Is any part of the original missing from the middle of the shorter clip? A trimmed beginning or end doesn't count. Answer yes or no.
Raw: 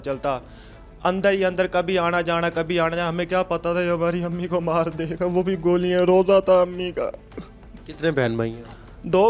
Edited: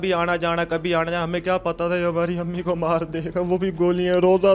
no